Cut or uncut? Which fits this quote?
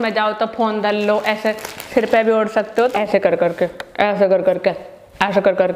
cut